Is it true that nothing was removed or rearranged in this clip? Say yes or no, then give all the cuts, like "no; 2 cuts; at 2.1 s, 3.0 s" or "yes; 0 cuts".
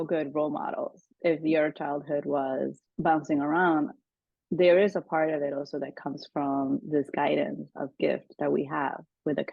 no; 1 cut; at 2.8 s